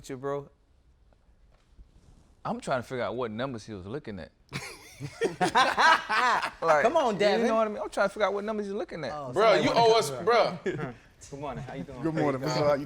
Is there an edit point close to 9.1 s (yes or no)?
yes